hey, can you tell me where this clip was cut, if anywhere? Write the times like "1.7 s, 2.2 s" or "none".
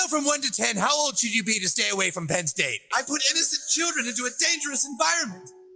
2.8 s